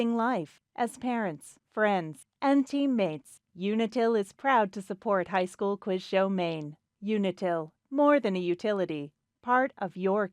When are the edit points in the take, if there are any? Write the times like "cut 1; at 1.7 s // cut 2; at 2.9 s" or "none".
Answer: none

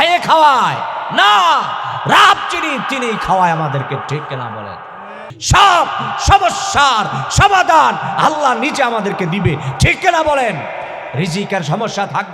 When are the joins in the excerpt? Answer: cut 1; at 5.3 s

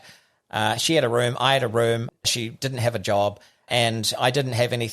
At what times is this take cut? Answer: cut 1; at 2.1 s // cut 2; at 3.7 s

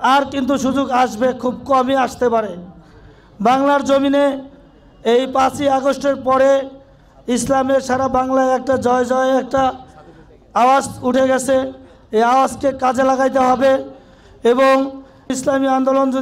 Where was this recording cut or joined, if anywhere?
cut 1; at 15.3 s

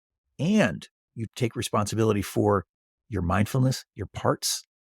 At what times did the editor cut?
cut 1; at 1.2 s

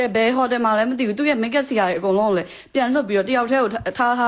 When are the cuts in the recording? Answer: none

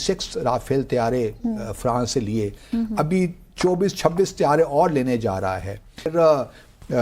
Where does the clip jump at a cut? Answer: cut 1; at 6.1 s

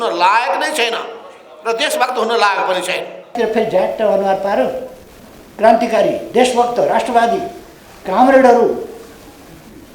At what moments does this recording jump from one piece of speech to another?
cut 1; at 3.3 s

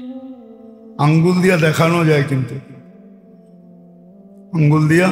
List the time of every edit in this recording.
none

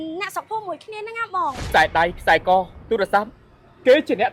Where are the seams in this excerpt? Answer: cut 1; at 1.6 s

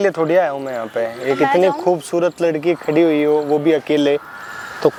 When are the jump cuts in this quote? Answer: none

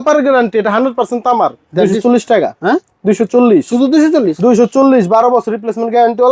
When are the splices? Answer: cut 1; at 1.6 s

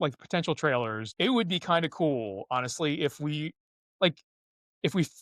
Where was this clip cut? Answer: cut 1; at 1.0 s

